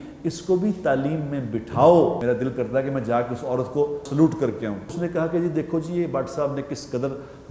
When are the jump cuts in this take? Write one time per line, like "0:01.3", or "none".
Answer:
0:02.2
0:04.1
0:04.9